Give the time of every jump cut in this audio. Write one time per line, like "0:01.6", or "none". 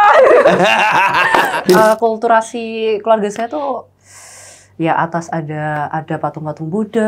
0:01.6

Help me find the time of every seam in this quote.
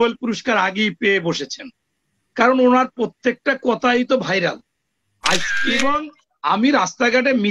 0:05.5

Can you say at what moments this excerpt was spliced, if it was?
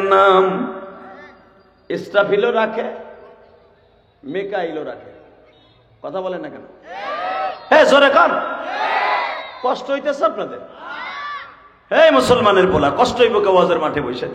none

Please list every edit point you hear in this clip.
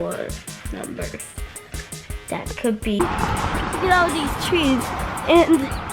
0:03.0

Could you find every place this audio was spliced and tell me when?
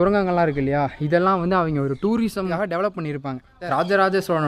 0:02.5
0:03.6

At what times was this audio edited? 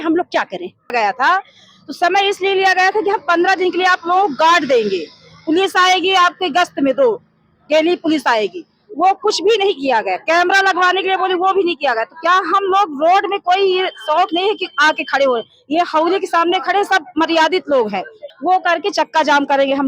0:00.9
0:18.2

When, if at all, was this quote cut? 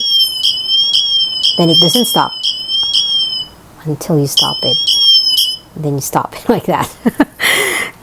none

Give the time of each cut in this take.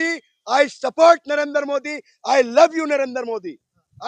none

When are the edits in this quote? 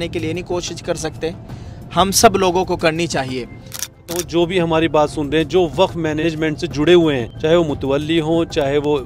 0:04.0
0:06.2
0:07.3

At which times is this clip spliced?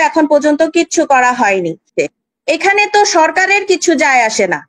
0:01.9

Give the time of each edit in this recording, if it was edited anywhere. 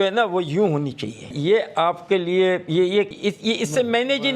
0:01.3
0:03.1

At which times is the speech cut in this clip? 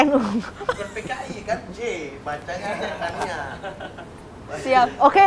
none

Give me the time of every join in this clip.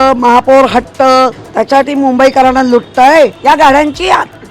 0:01.5
0:03.4

